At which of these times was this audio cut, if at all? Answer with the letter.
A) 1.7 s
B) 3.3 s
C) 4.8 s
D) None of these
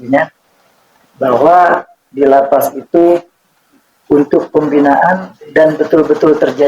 D